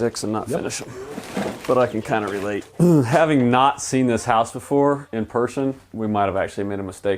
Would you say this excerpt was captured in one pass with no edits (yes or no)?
no